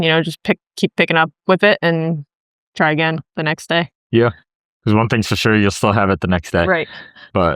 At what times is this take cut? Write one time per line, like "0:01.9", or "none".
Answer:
none